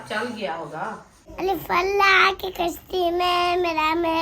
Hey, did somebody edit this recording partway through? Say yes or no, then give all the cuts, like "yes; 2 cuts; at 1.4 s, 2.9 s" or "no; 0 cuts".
yes; 1 cut; at 1.3 s